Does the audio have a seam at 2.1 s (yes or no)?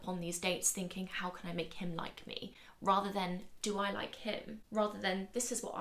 no